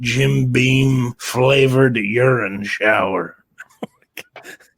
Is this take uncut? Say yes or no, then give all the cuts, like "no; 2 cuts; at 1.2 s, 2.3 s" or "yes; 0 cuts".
no; 1 cut; at 1.2 s